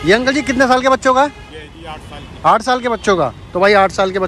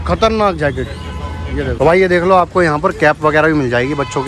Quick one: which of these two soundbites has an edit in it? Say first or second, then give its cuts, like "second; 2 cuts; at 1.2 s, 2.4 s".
second; 1 cut; at 1.7 s